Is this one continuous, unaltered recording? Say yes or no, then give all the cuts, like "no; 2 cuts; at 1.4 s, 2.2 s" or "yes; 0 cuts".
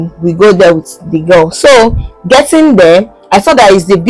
yes; 0 cuts